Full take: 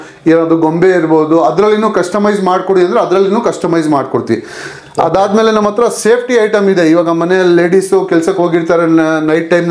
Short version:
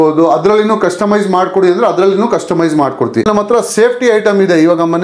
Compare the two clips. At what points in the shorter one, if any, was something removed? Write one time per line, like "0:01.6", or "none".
0:03.2